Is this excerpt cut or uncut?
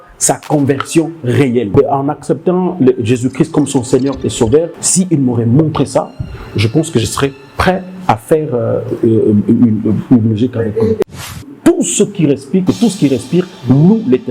cut